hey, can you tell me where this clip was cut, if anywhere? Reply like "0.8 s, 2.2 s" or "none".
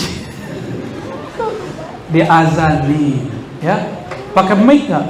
1.9 s